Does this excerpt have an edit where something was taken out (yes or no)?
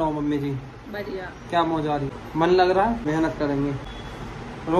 yes